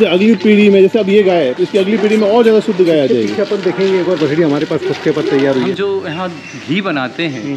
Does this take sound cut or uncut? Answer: cut